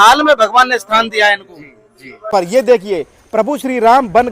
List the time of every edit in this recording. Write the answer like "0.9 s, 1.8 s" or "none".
2.3 s